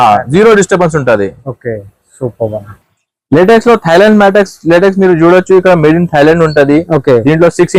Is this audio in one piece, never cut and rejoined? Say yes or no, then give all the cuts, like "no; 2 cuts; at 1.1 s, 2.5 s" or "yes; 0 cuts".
yes; 0 cuts